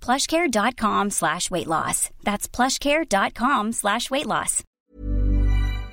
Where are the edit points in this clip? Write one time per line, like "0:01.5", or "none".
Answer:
0:04.8